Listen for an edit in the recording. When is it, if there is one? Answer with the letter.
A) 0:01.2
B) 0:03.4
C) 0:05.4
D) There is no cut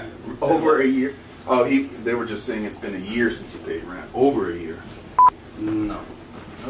D